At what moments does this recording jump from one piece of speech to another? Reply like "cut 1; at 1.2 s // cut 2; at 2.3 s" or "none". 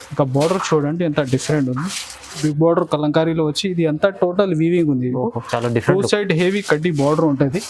cut 1; at 2.4 s